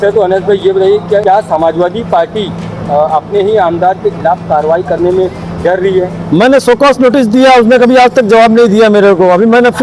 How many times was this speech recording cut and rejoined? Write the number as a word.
one